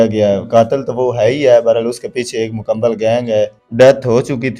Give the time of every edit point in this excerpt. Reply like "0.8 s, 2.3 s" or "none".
3.6 s